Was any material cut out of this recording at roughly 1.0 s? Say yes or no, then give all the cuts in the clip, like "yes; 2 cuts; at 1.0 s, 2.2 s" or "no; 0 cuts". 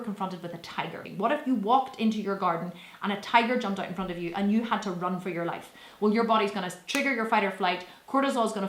yes; 1 cut; at 1.0 s